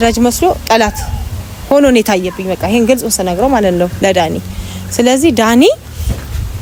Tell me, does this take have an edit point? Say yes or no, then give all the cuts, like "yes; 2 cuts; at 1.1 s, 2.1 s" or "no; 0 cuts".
no; 0 cuts